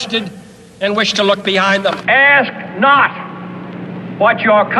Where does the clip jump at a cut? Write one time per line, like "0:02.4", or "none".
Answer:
0:02.0